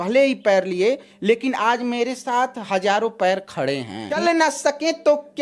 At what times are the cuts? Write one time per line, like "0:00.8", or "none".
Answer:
0:04.2